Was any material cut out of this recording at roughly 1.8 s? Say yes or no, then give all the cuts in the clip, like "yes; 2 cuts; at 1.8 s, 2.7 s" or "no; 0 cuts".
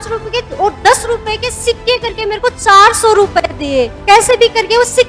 no; 1 cut; at 3.9 s